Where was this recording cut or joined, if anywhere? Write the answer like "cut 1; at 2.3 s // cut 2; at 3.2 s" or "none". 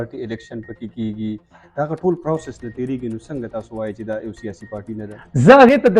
none